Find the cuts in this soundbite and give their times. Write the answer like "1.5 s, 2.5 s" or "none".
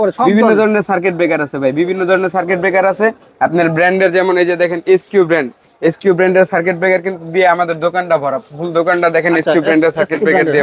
none